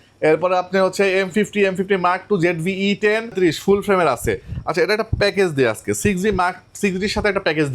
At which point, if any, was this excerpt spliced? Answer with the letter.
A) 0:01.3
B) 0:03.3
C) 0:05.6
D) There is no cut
B